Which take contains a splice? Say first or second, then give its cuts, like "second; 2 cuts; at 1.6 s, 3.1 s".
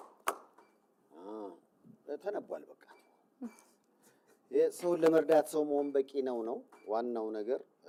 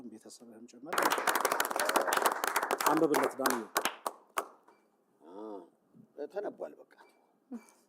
second; 1 cut; at 1.0 s